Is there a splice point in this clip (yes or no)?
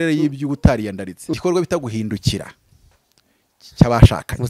yes